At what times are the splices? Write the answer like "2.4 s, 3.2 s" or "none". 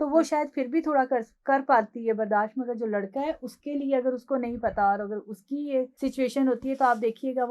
5.9 s